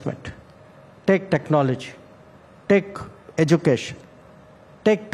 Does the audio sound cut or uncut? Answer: uncut